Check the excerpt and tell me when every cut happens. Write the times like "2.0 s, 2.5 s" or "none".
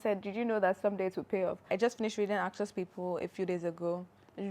1.6 s